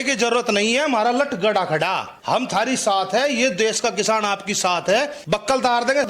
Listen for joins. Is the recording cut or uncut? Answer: cut